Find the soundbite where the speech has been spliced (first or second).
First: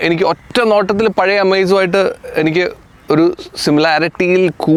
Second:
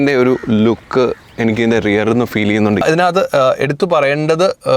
second